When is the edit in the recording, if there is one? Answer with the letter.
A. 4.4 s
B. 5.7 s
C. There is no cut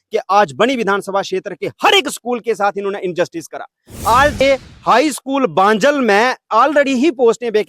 A